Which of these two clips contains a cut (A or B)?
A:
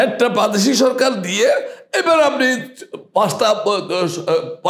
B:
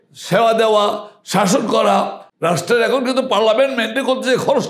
B